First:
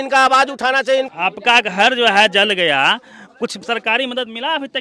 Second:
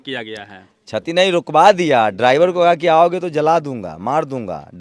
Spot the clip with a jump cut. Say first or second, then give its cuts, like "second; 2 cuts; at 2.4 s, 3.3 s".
first; 1 cut; at 1.1 s